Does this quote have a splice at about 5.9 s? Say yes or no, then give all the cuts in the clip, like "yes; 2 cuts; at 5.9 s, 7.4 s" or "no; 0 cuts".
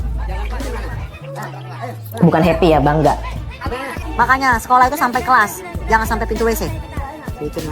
no; 1 cut; at 4.0 s